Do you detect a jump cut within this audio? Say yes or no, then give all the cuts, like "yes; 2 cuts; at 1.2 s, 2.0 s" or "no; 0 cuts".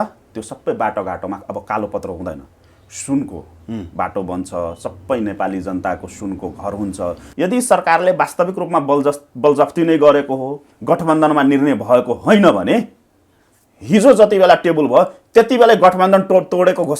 yes; 1 cut; at 7.2 s